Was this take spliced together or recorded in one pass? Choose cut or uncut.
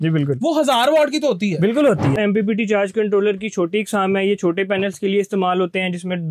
cut